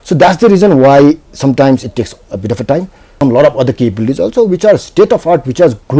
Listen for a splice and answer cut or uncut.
cut